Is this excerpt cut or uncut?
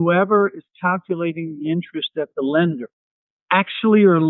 uncut